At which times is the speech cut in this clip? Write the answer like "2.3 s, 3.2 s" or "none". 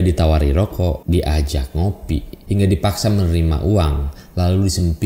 1.0 s, 2.3 s